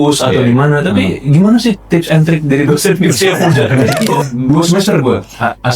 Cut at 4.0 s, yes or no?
yes